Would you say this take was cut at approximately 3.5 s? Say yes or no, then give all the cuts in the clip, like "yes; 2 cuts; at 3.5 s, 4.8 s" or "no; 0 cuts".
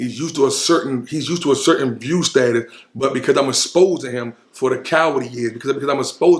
no; 0 cuts